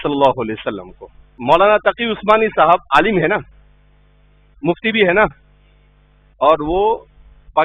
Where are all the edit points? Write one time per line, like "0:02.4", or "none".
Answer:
0:01.3